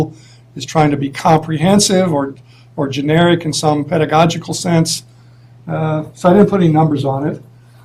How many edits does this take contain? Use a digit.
0